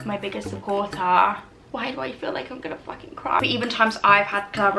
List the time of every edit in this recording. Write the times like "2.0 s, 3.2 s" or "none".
3.4 s